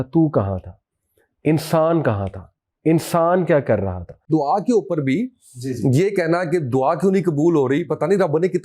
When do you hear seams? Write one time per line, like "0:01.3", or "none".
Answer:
0:04.3